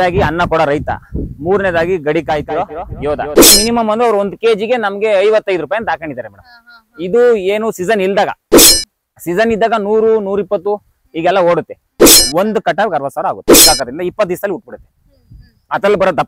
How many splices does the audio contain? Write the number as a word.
three